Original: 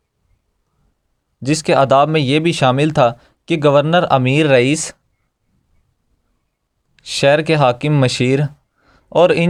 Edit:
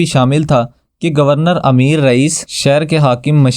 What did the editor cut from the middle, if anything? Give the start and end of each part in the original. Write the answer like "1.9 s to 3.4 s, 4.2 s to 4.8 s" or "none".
4.9 s to 7.0 s

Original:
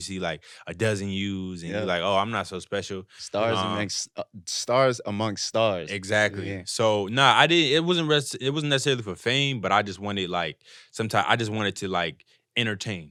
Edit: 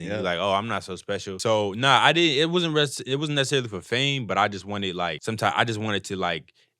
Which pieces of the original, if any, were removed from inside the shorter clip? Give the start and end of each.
2.9 s to 6.7 s, 10.5 s to 10.9 s

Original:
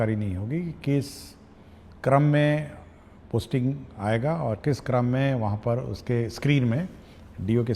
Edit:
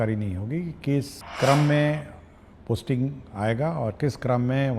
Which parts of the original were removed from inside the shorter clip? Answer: 1.2 s to 1.8 s

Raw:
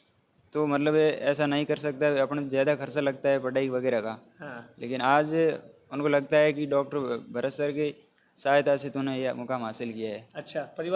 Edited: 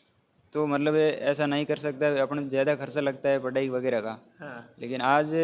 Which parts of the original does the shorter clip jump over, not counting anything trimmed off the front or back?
none

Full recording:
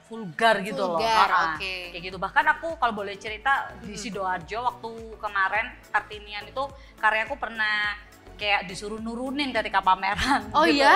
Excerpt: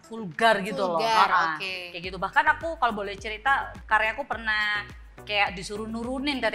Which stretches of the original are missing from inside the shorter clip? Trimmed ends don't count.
3.8 s to 6.9 s

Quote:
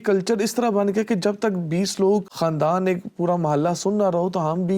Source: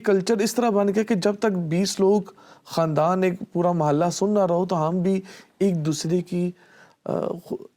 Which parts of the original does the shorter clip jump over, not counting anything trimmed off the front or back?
2.3 s to 2.7 s

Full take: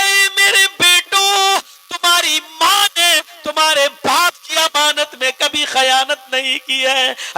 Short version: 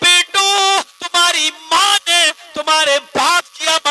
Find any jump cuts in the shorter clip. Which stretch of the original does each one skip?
1.7 s to 1.9 s

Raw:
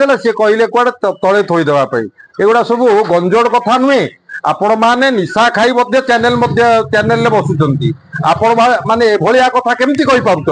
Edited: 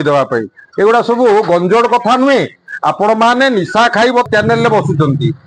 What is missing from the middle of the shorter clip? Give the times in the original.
5.9 s to 6.9 s

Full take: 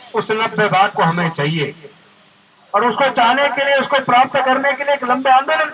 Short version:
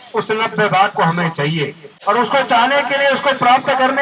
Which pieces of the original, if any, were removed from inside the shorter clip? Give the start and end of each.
1.9 s to 2.5 s

